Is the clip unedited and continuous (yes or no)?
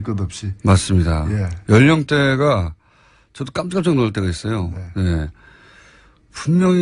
yes